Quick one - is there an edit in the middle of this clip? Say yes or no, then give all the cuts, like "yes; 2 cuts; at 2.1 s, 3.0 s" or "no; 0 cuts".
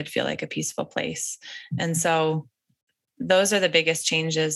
no; 0 cuts